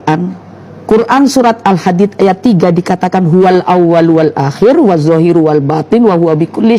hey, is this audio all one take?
yes; 0 cuts

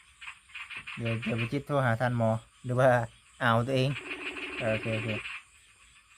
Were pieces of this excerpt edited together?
no; 0 cuts

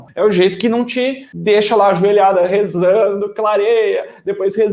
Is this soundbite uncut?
no; 1 cut; at 1.3 s

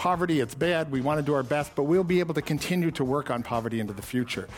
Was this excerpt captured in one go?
yes; 0 cuts

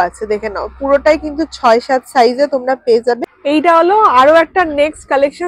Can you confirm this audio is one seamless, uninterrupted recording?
no; 1 cut; at 3.3 s

